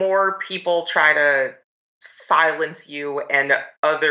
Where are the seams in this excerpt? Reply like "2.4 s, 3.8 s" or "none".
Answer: none